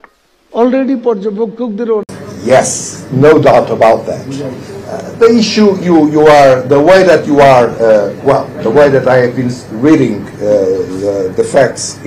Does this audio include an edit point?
yes; 1 cut; at 2.2 s

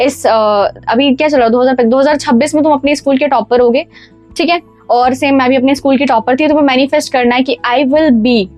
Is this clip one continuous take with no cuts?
yes; 0 cuts

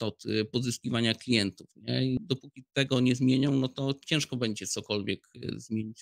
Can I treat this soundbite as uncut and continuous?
no; 1 cut; at 2.2 s

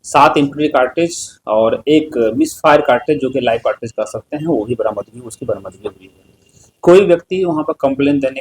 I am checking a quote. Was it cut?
no; 0 cuts

